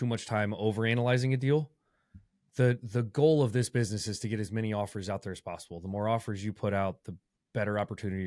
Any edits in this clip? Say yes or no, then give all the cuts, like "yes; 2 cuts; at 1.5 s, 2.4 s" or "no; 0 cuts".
no; 0 cuts